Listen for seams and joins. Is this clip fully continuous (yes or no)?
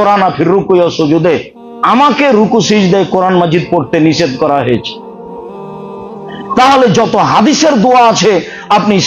no